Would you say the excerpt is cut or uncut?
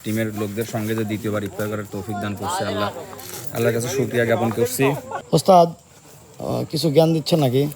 cut